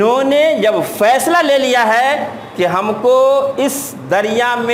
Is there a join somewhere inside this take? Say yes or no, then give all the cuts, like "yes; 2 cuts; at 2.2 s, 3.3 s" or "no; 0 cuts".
no; 0 cuts